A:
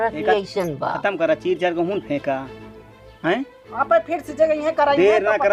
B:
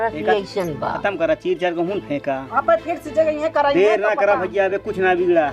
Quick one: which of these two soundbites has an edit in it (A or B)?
B